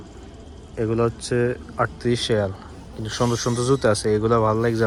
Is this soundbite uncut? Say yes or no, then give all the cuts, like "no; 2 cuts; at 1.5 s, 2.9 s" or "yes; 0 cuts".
yes; 0 cuts